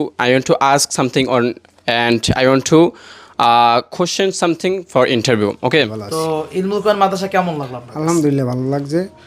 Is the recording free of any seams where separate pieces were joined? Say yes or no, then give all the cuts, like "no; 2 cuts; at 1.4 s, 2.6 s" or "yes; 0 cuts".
no; 1 cut; at 5.8 s